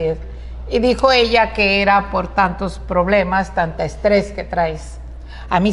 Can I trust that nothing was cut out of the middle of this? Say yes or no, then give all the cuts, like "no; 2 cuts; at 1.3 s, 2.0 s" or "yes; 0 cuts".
yes; 0 cuts